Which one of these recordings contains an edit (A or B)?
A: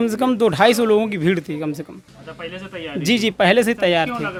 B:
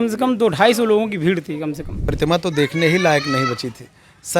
B